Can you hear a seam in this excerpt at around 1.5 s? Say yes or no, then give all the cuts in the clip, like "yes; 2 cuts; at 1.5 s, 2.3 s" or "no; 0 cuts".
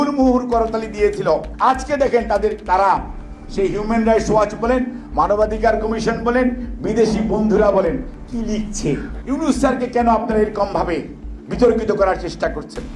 yes; 2 cuts; at 1.5 s, 9.1 s